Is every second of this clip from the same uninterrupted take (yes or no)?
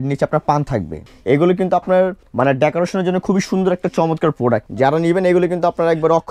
no